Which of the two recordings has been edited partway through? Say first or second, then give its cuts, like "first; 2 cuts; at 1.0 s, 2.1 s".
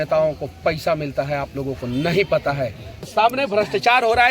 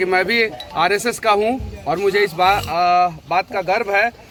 first; 1 cut; at 3.0 s